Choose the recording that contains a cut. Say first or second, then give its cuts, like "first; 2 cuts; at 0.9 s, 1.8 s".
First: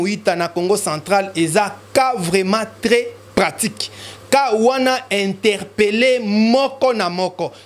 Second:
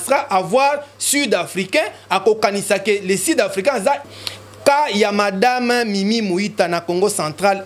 second; 1 cut; at 4.0 s